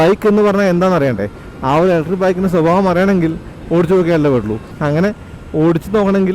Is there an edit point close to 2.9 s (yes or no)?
no